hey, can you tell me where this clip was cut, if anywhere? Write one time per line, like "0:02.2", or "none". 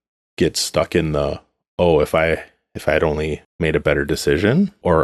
none